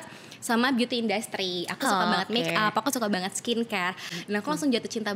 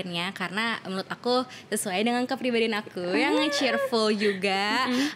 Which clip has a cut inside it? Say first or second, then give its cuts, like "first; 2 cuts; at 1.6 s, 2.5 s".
first; 1 cut; at 4.1 s